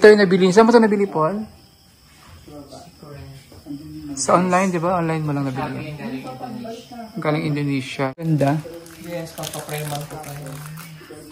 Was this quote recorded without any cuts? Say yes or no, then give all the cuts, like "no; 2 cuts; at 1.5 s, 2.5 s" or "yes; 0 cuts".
no; 1 cut; at 8.2 s